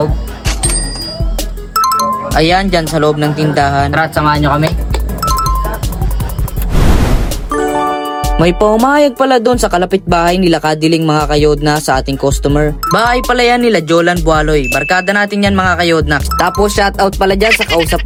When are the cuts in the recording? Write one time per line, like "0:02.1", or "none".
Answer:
none